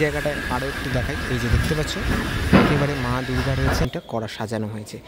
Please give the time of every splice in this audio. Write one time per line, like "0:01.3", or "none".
0:03.8